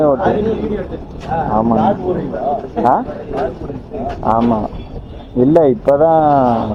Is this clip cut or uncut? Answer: uncut